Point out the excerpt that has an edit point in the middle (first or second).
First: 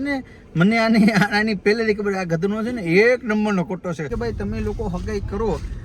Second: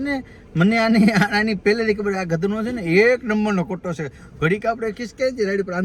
first